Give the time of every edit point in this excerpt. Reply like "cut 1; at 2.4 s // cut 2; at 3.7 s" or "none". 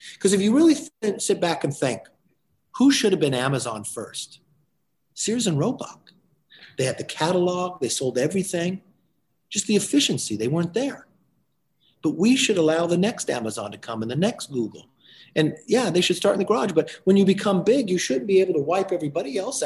cut 1; at 0.9 s